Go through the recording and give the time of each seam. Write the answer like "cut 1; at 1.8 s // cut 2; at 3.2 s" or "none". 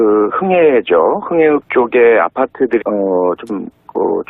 none